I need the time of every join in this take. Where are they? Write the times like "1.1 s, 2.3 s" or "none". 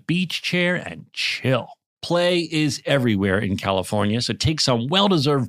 none

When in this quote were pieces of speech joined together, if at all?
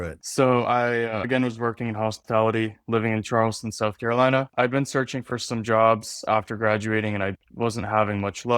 1.3 s

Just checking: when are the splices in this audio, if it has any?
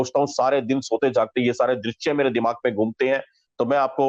none

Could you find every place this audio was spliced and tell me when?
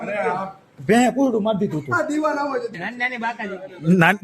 2.7 s

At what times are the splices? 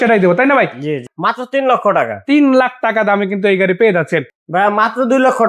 1.1 s, 4.3 s

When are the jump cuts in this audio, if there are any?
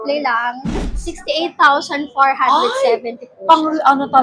0.9 s

